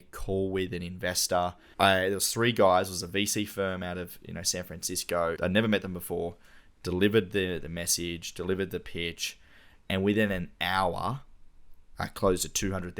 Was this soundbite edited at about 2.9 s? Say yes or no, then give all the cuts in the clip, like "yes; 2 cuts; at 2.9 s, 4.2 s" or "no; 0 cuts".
no; 2 cuts; at 1.6 s, 5.4 s